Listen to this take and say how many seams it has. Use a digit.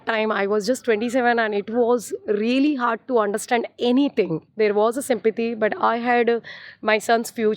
1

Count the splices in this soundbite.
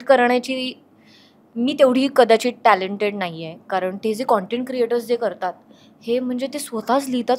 0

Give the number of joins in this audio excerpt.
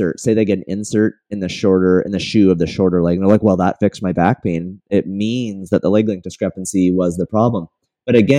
0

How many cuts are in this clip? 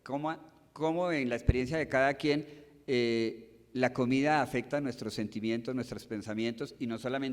1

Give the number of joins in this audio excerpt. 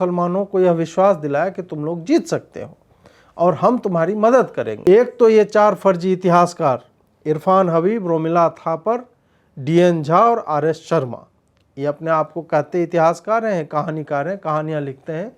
1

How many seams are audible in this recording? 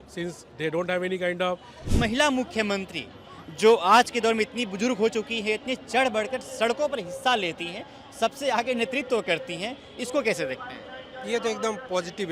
1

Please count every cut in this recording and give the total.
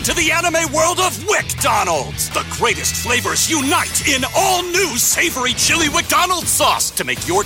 0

